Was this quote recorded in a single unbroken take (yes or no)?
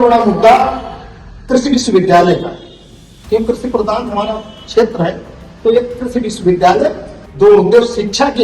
no